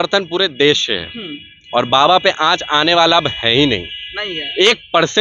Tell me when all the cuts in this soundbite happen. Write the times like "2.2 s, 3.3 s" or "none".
none